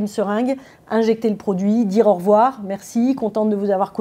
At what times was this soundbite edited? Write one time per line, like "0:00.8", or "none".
none